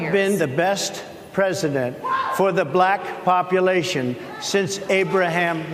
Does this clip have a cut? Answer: no; 0 cuts

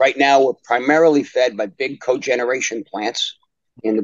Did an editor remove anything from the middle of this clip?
no; 0 cuts

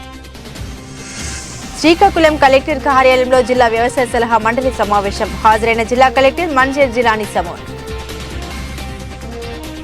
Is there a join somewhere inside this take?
yes; 1 cut; at 1.4 s

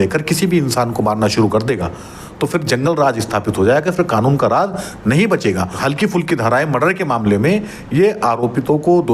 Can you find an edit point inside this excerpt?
yes; 1 cut; at 5.8 s

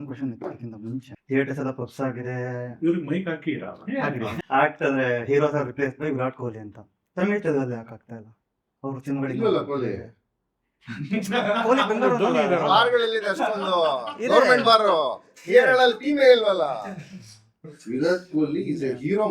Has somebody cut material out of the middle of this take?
yes; 1 cut; at 1.1 s

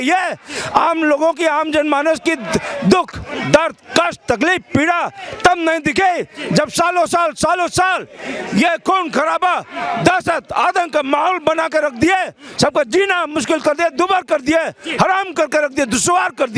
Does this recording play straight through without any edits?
yes; 0 cuts

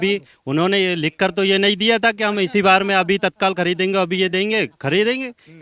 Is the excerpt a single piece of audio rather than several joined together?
yes; 0 cuts

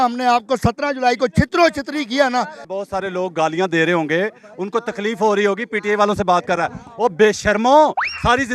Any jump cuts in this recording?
yes; 1 cut; at 2.6 s

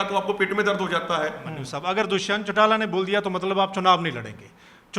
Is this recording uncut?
no; 1 cut; at 1.6 s

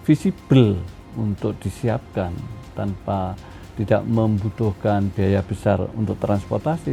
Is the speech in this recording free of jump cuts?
yes; 0 cuts

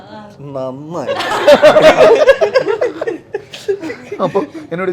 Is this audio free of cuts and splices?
yes; 0 cuts

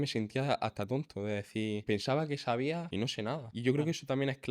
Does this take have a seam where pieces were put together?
yes; 2 cuts; at 1.8 s, 3.1 s

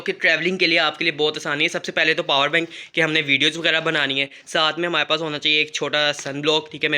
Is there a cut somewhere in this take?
no; 0 cuts

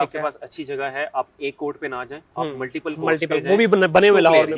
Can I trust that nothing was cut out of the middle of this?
yes; 0 cuts

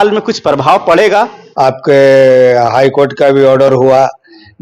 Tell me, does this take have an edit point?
yes; 1 cut; at 1.4 s

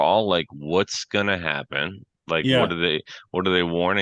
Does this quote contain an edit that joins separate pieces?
no; 0 cuts

